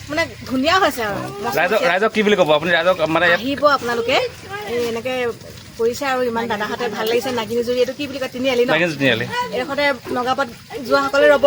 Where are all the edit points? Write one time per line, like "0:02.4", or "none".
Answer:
none